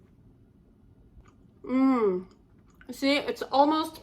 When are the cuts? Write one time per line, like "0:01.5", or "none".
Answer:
0:01.2